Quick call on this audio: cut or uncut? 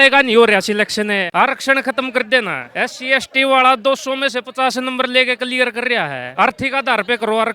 uncut